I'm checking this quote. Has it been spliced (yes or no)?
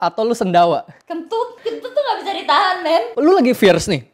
yes